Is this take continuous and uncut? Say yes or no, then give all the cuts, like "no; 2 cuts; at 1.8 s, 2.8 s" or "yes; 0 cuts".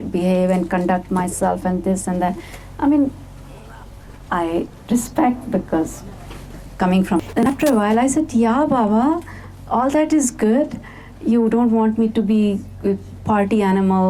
yes; 0 cuts